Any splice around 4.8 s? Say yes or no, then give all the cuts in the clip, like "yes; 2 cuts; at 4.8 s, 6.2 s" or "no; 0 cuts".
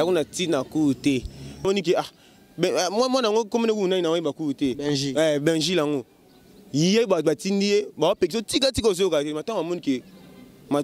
no; 1 cut; at 1.6 s